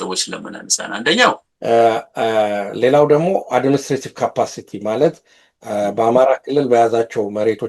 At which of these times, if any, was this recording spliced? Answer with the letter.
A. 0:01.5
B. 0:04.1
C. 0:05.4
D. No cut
A